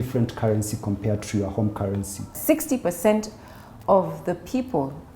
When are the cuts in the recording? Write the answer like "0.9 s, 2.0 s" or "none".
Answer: 2.4 s